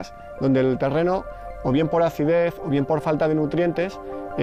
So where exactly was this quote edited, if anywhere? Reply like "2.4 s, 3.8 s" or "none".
none